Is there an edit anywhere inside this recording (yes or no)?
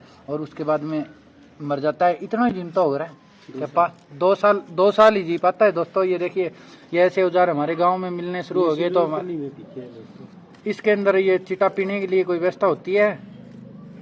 no